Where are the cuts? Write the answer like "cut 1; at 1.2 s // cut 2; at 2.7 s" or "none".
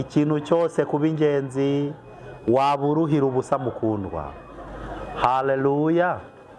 none